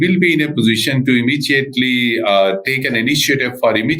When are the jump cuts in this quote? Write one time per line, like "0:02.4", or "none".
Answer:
none